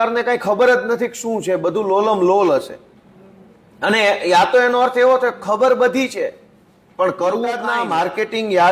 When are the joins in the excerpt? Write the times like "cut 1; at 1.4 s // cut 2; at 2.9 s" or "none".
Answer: cut 1; at 7.7 s